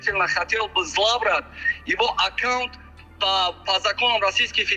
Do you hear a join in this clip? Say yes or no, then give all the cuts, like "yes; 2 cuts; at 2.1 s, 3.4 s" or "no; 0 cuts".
no; 0 cuts